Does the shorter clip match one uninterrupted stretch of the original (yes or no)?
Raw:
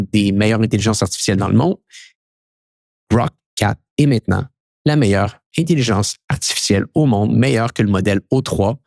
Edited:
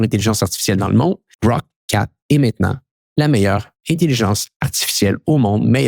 no